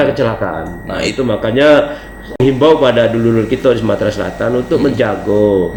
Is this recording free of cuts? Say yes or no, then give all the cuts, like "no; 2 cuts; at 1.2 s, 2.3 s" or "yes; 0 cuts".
yes; 0 cuts